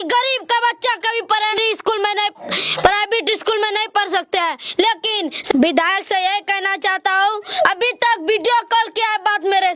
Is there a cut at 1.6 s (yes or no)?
yes